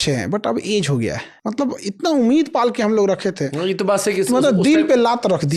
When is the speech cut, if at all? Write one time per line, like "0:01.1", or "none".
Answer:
0:01.3